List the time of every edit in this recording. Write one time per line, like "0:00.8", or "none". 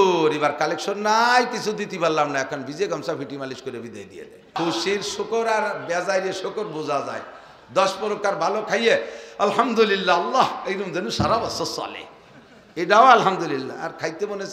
0:04.6